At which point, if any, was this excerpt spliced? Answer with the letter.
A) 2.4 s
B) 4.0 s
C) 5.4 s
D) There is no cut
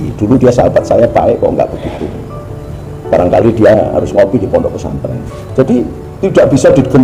C